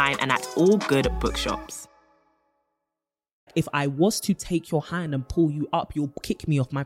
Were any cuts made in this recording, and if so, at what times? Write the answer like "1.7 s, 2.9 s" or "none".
3.5 s